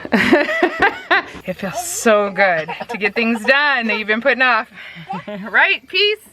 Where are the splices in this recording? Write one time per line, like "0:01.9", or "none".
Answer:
0:01.4